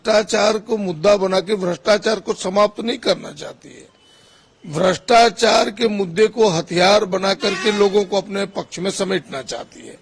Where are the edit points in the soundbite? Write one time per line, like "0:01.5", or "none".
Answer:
none